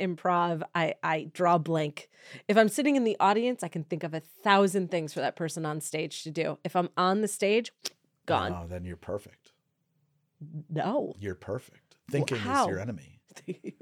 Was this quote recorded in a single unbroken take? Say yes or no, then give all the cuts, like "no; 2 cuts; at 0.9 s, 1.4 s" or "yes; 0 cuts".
yes; 0 cuts